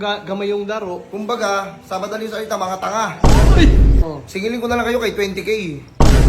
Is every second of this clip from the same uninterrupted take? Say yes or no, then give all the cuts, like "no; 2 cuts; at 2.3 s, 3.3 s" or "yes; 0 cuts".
no; 1 cut; at 4.0 s